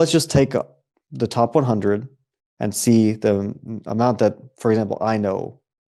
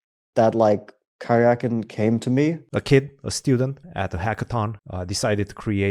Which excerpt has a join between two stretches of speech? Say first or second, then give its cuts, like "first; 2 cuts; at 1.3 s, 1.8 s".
second; 3 cuts; at 2.7 s, 3.8 s, 4.8 s